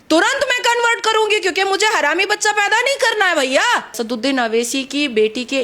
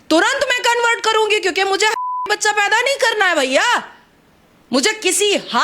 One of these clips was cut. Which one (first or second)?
first